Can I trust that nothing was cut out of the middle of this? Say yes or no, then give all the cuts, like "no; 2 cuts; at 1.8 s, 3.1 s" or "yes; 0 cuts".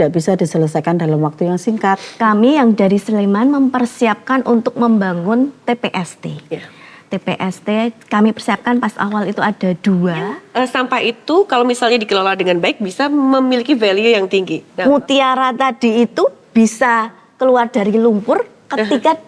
no; 3 cuts; at 2.1 s, 10.4 s, 14.7 s